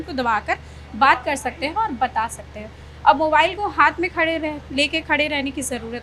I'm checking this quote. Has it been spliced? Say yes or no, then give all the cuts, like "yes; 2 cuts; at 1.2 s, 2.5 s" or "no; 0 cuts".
no; 0 cuts